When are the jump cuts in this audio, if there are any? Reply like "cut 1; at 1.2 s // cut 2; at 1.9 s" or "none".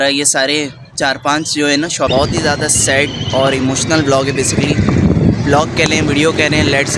cut 1; at 2.1 s